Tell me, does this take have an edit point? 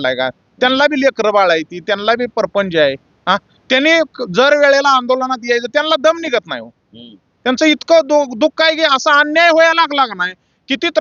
no; 0 cuts

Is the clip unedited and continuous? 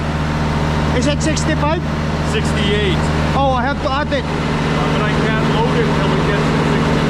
yes; 0 cuts

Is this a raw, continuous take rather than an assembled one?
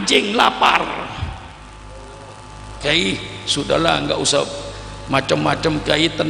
no; 1 cut; at 2.8 s

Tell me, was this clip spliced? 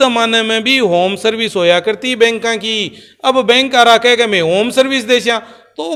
no; 0 cuts

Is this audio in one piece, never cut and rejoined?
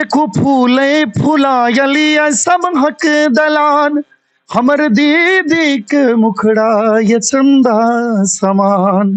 yes; 0 cuts

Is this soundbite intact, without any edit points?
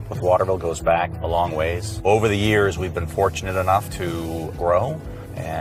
yes; 0 cuts

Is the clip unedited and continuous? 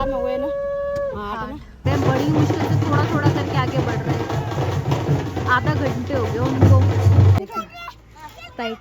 no; 2 cuts; at 1.9 s, 7.4 s

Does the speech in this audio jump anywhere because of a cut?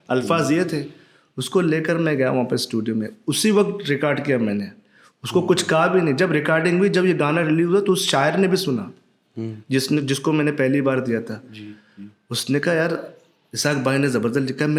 no; 0 cuts

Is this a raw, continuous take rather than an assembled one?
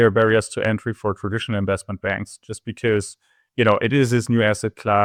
yes; 0 cuts

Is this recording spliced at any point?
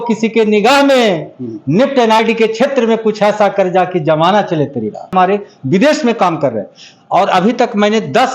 yes; 1 cut; at 5.1 s

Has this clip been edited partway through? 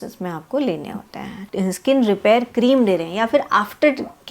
yes; 1 cut; at 1.4 s

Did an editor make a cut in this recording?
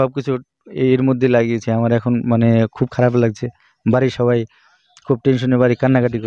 no; 0 cuts

